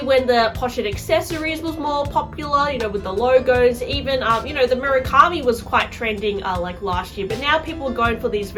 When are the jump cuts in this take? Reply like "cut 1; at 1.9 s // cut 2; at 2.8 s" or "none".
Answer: none

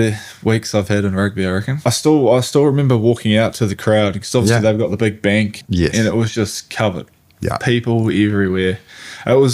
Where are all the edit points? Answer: cut 1; at 1.9 s // cut 2; at 5.6 s

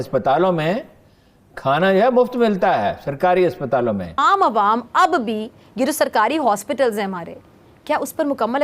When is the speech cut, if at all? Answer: cut 1; at 4.2 s

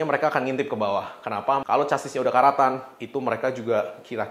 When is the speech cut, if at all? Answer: cut 1; at 1.6 s

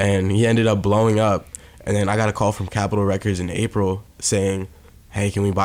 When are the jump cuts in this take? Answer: cut 1; at 2.7 s

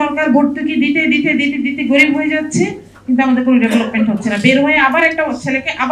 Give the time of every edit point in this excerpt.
none

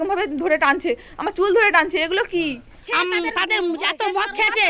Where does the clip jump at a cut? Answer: cut 1; at 2.8 s

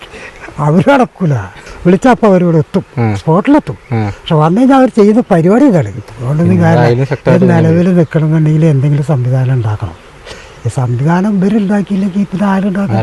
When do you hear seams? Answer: cut 1; at 1.6 s // cut 2; at 6.0 s

